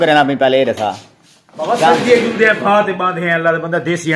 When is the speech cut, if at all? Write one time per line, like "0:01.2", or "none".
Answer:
none